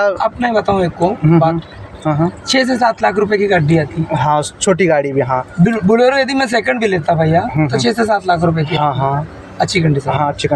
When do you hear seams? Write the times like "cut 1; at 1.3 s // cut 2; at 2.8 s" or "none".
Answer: none